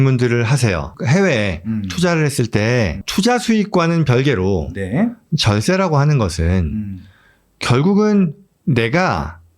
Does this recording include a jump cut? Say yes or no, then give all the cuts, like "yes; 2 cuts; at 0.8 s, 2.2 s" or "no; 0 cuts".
yes; 2 cuts; at 1.0 s, 3.0 s